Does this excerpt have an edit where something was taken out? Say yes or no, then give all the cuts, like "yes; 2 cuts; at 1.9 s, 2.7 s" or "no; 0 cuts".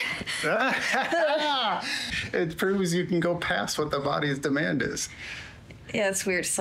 yes; 1 cut; at 2.1 s